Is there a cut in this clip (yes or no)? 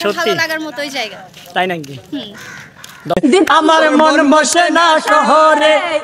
yes